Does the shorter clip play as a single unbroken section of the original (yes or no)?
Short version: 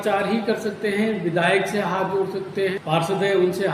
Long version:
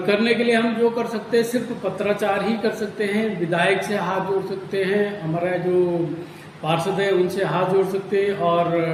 no